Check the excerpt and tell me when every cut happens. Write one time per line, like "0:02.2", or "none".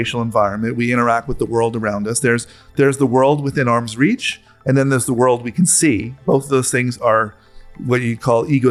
none